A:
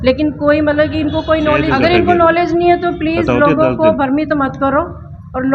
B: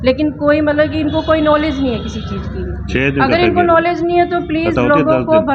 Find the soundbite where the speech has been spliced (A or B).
A